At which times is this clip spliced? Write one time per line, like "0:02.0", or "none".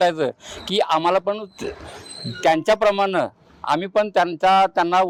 none